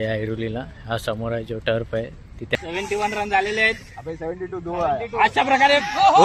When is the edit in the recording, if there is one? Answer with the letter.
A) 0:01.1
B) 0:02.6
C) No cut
B